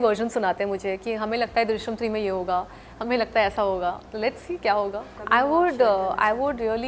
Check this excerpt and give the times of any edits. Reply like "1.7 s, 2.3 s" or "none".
5.1 s